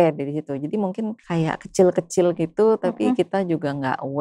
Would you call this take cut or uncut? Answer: cut